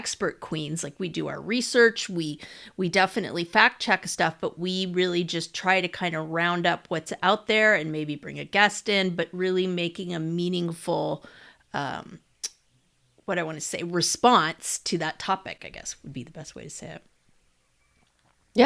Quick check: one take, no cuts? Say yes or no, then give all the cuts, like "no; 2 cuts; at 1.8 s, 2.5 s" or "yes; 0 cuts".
yes; 0 cuts